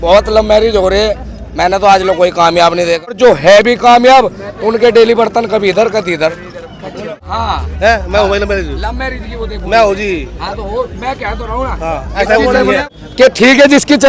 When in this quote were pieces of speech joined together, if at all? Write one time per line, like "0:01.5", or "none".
0:03.2
0:07.0
0:13.0

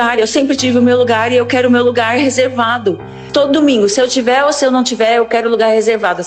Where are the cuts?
0:03.2

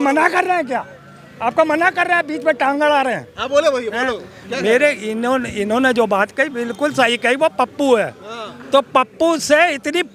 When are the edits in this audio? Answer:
none

